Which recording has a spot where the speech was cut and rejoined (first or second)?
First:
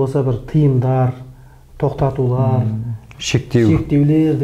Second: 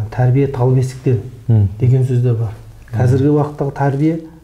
second